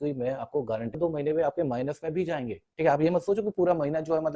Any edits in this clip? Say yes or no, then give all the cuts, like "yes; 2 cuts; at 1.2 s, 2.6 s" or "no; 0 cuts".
yes; 1 cut; at 1.0 s